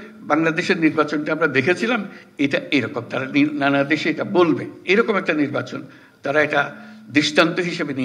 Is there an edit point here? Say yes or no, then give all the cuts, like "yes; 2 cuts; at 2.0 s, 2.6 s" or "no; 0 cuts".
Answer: no; 0 cuts